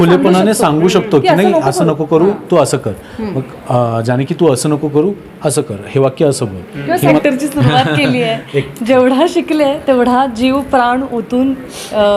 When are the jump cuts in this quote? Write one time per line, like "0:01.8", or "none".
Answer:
0:07.2